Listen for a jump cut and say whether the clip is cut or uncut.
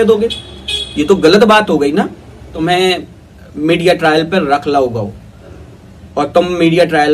cut